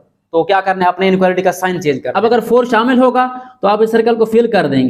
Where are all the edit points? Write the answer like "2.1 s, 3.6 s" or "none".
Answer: 2.1 s